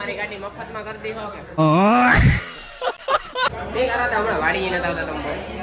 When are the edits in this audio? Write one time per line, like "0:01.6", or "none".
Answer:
0:01.6
0:03.4